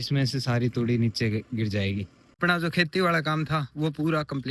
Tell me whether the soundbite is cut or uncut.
cut